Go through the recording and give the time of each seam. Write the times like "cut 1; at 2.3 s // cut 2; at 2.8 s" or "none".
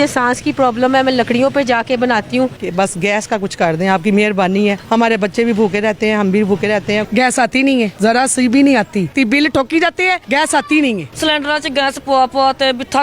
cut 1; at 2.6 s // cut 2; at 4.8 s // cut 3; at 7.1 s // cut 4; at 7.9 s // cut 5; at 9.1 s // cut 6; at 10.2 s // cut 7; at 11.1 s